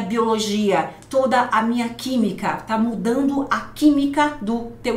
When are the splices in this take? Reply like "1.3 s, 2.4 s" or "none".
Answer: none